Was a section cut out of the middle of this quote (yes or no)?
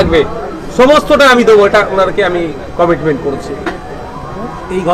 no